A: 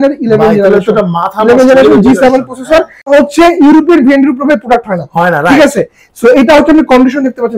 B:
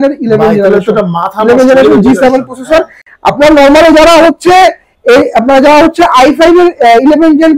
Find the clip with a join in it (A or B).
A